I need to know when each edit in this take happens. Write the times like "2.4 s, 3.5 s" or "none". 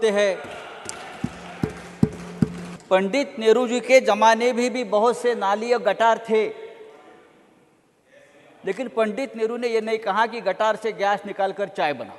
2.6 s